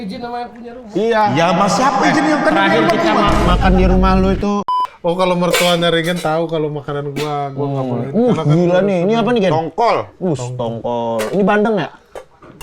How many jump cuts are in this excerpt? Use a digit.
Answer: 1